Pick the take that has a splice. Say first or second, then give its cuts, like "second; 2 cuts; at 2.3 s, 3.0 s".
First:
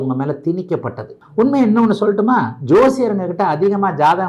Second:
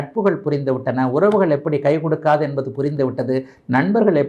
first; 1 cut; at 1.2 s